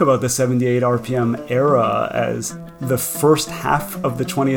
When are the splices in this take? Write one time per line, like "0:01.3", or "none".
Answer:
0:02.8